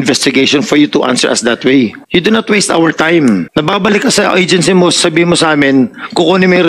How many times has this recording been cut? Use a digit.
2